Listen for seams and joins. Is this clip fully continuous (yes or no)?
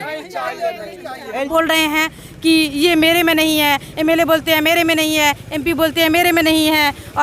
no